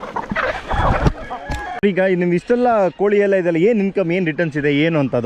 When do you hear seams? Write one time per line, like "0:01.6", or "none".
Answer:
0:01.8